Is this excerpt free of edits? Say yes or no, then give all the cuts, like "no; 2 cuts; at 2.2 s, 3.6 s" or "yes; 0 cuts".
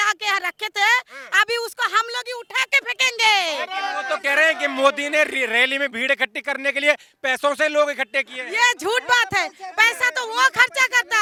yes; 0 cuts